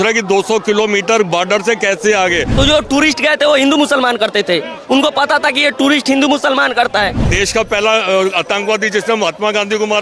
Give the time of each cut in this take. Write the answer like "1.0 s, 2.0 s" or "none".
2.5 s, 7.3 s